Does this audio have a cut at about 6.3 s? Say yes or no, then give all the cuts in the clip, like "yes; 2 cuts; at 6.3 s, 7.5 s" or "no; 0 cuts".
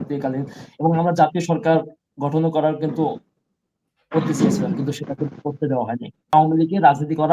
yes; 1 cut; at 6.3 s